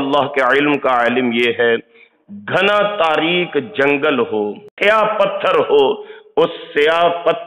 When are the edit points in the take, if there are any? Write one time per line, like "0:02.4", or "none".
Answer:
0:04.7